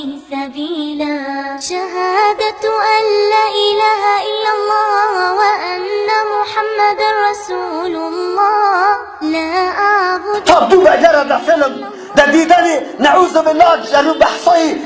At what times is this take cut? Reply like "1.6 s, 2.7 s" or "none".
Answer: 10.3 s